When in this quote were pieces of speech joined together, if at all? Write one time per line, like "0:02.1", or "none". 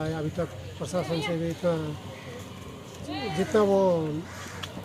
none